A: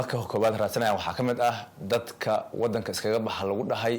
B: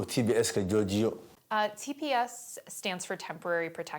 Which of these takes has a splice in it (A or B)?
B